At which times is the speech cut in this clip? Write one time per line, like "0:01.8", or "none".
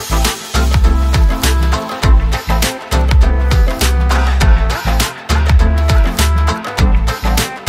none

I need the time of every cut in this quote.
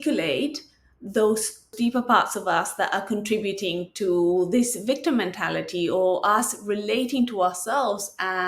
0:01.7

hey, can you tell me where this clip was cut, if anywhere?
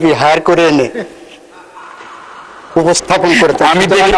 none

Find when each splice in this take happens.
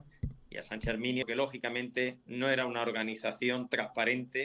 0:01.2

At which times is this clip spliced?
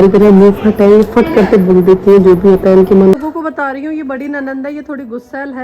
0:03.2

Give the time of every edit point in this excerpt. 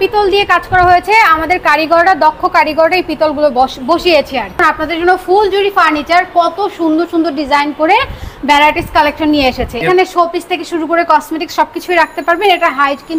0:04.6
0:09.8

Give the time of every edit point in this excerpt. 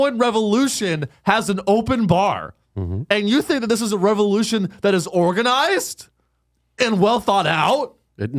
none

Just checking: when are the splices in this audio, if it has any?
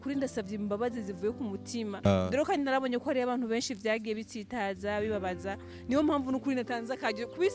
0:02.1

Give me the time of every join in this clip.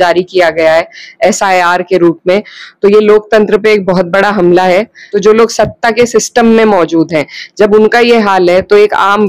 0:05.0

